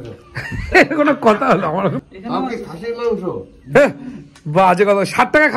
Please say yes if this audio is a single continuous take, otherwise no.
no